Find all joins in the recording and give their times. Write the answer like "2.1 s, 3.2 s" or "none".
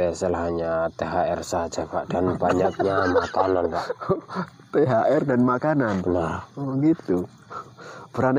none